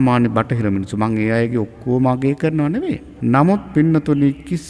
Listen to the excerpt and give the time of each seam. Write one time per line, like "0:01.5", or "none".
0:03.1